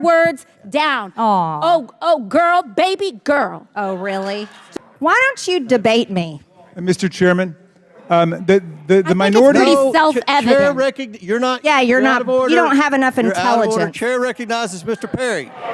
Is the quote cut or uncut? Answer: cut